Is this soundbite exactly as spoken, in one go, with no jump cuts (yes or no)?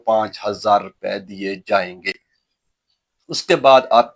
yes